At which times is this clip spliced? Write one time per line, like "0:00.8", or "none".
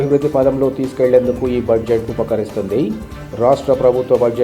none